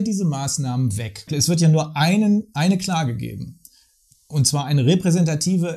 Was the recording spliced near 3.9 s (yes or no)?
no